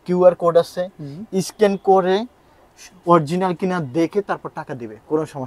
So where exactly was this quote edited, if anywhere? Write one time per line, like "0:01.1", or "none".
none